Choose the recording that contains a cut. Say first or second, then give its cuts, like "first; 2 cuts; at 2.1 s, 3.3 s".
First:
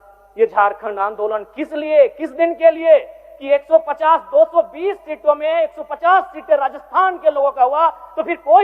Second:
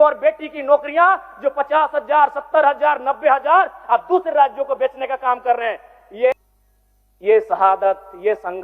second; 1 cut; at 6.3 s